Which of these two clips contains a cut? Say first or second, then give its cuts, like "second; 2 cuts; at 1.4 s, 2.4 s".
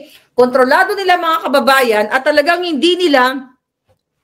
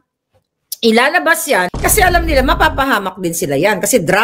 second; 1 cut; at 1.7 s